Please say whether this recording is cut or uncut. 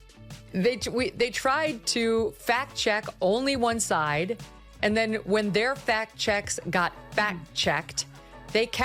uncut